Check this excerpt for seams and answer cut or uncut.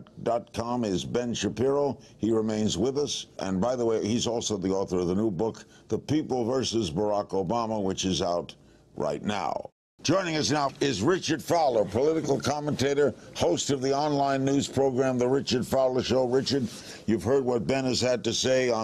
cut